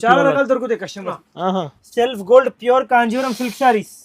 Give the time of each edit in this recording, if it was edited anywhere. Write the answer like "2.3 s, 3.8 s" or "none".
1.2 s